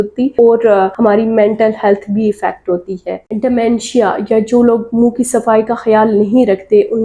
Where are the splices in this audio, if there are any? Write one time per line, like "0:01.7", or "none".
0:03.2